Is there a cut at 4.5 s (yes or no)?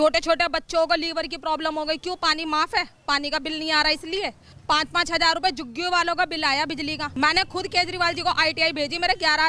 yes